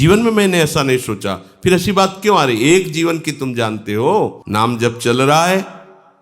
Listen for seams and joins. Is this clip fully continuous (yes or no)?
no